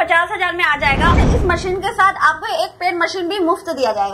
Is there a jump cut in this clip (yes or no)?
yes